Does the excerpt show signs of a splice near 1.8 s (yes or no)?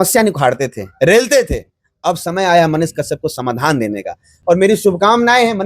no